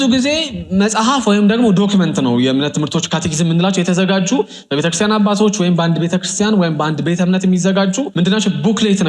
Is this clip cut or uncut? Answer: cut